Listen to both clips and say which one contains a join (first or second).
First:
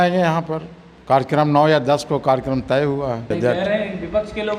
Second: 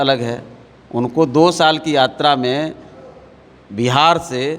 first